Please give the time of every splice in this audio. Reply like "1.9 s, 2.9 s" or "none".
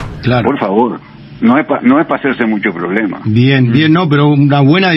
none

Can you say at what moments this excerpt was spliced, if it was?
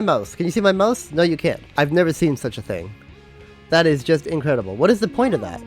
1.6 s

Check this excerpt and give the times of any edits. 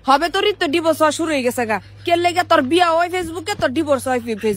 none

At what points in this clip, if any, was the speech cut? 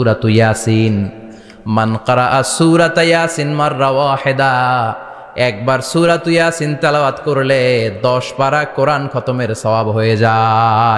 none

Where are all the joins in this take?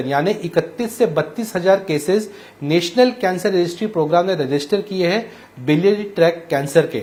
none

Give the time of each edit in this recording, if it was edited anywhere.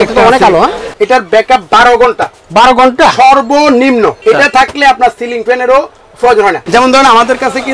0.9 s, 4.2 s, 6.6 s

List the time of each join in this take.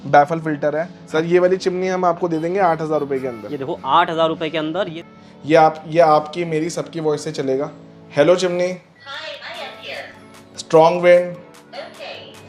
1.0 s, 5.0 s

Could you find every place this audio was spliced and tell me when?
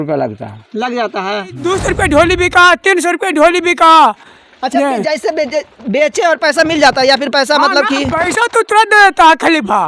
1.6 s

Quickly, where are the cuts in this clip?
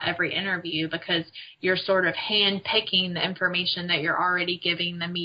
none

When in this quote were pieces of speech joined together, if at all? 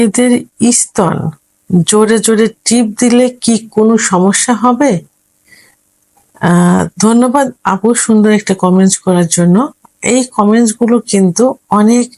none

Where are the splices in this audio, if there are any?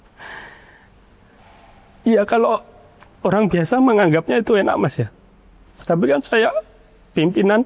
none

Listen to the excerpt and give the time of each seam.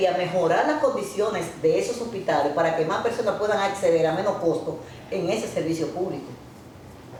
none

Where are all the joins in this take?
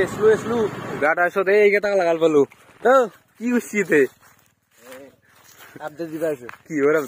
1.0 s

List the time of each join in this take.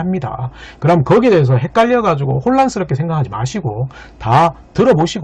none

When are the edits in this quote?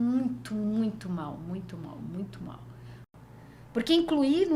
3.0 s

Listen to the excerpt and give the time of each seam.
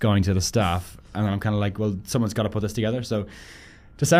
none

